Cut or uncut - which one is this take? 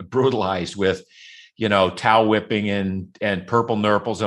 uncut